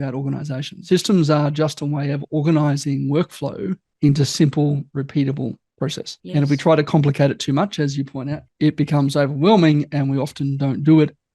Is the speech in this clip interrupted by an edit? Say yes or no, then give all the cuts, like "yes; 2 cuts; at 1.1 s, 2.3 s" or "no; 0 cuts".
yes; 1 cut; at 8.4 s